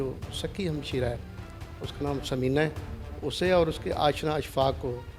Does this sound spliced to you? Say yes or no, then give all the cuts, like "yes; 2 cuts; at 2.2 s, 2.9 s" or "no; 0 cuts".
no; 0 cuts